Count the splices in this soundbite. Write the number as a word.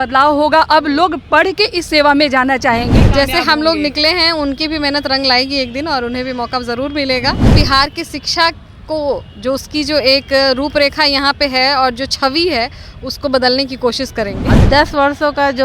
three